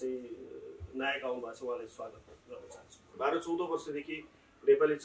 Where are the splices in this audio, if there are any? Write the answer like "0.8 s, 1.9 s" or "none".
3.1 s